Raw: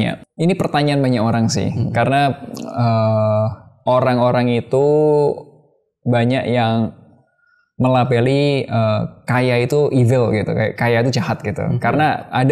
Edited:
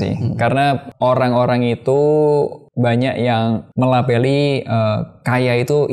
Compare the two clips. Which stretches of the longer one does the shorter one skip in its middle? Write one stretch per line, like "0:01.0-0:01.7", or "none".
0:02.4-0:03.7
0:05.5-0:05.9
0:07.0-0:07.7